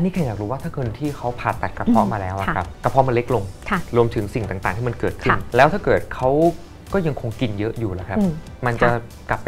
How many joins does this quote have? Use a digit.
2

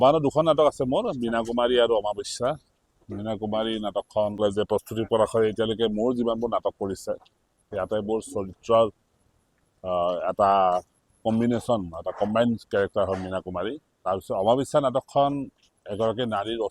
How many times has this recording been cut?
2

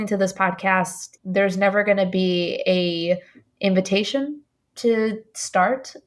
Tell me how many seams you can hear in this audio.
1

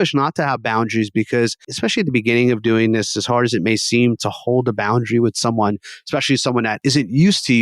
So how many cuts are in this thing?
2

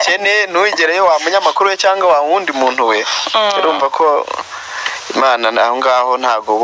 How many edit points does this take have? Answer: 0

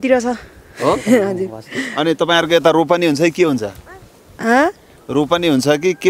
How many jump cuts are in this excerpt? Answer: 0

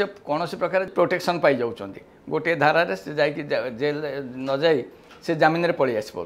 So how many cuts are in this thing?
1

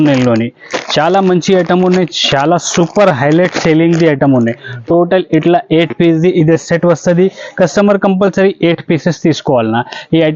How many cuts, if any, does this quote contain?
0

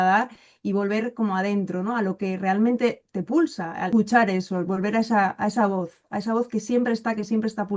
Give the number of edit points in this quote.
1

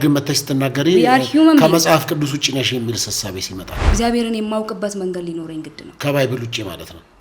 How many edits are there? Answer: 1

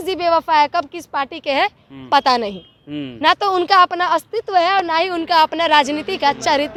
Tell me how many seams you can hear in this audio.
0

